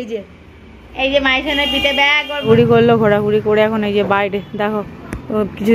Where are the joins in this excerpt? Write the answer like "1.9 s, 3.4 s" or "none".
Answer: 2.5 s